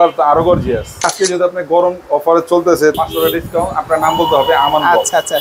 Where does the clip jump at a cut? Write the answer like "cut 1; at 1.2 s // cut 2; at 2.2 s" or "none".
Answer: cut 1; at 1.1 s // cut 2; at 2.9 s